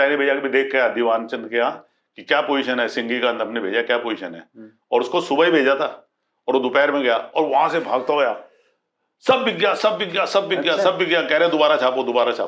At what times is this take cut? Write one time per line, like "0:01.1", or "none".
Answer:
none